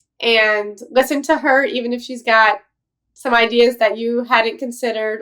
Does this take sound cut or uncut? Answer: uncut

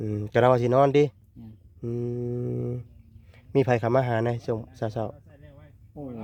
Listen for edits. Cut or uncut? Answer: uncut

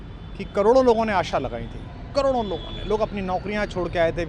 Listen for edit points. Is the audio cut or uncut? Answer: uncut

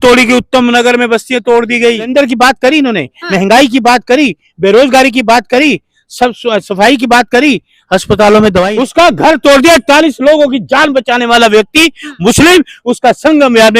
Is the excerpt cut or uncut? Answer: cut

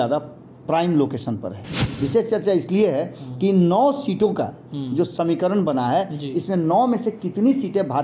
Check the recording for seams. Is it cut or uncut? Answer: cut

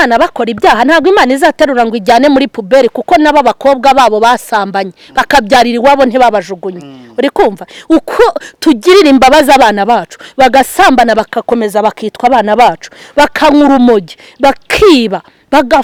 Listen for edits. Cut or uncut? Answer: uncut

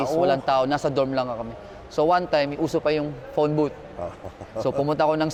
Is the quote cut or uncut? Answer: uncut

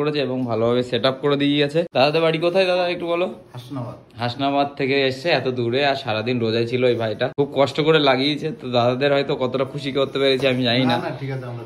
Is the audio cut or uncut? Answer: cut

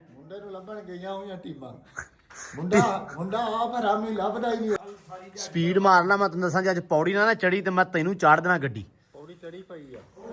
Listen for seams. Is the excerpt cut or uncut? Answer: cut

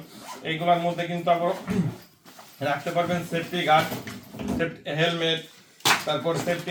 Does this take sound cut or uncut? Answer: uncut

